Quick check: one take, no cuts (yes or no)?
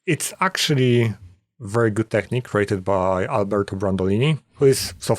yes